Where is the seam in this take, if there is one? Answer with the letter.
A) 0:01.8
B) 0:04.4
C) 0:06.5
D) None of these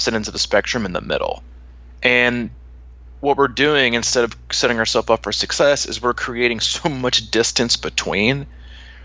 D